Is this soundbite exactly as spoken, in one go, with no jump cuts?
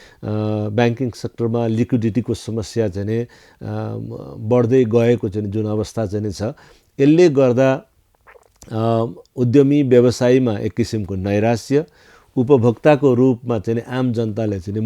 yes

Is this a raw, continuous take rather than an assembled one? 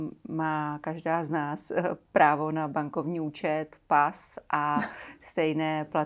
yes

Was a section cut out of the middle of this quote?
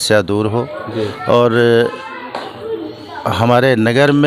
no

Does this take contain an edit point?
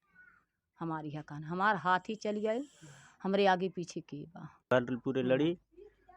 yes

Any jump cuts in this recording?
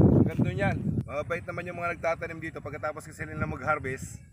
yes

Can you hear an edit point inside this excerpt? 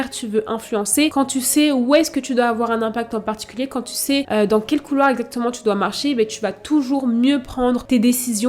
no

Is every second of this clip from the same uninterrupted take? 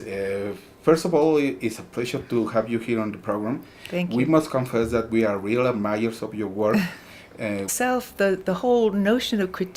yes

